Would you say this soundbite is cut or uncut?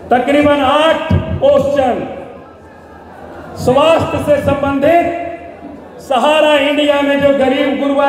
uncut